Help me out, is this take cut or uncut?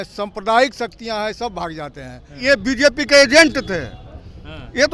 cut